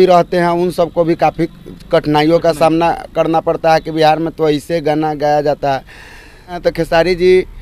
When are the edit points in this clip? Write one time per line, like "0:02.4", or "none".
0:06.6